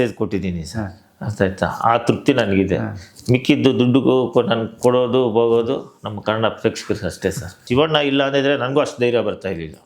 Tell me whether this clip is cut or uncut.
cut